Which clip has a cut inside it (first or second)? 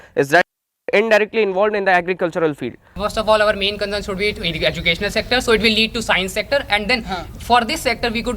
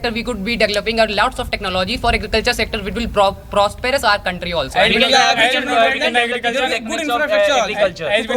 first